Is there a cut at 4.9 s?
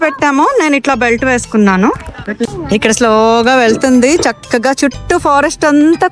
no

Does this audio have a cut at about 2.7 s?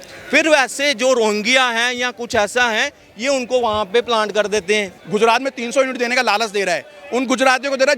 no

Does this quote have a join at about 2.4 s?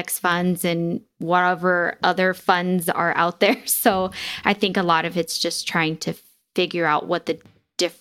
no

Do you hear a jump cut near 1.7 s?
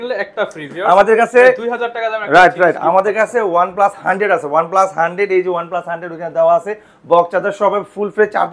no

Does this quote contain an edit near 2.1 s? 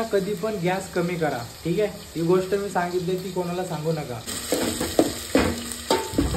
no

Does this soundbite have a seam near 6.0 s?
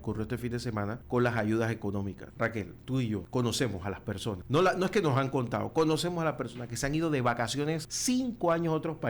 no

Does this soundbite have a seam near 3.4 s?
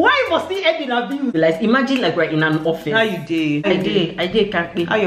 yes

